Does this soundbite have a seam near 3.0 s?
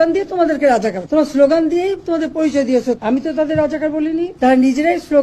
yes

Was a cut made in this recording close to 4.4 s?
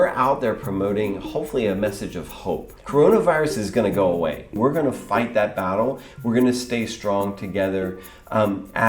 yes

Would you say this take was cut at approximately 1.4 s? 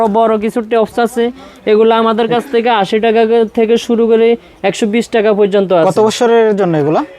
no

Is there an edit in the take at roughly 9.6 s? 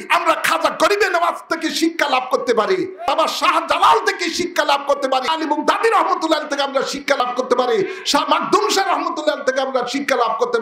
no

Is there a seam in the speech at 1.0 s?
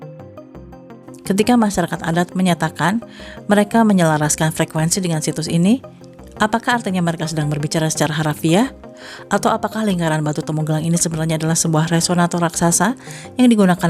yes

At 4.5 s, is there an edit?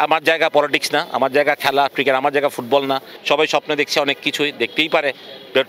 no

